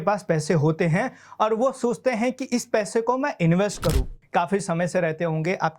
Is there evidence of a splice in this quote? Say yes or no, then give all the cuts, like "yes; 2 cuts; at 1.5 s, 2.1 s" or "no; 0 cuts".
yes; 1 cut; at 4.1 s